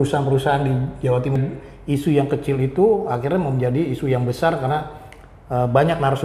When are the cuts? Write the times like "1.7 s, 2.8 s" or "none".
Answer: 1.4 s